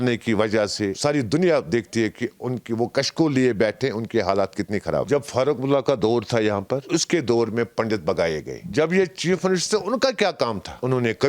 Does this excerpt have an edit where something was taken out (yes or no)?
yes